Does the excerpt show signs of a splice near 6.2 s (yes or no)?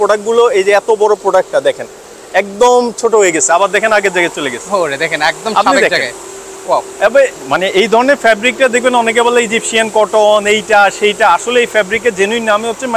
no